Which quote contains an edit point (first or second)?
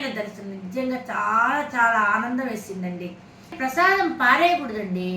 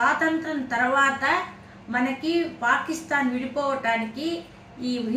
first